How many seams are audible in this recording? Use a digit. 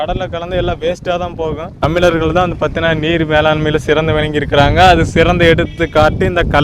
1